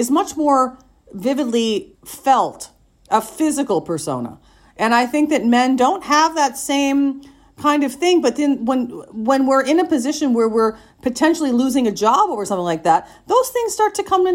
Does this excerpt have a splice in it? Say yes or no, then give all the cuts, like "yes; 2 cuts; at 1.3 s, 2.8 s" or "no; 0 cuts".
no; 0 cuts